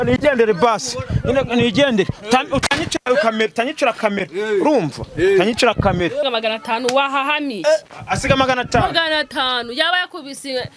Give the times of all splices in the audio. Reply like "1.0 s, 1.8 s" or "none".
6.3 s